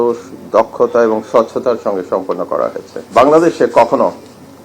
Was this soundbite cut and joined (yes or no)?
yes